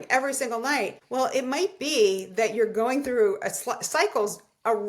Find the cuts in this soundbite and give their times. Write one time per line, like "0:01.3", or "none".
0:01.0